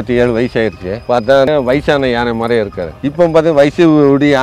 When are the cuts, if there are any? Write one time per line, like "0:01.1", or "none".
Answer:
0:01.4
0:02.9